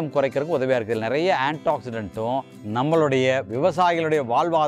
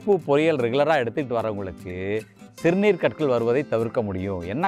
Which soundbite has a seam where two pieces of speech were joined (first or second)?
first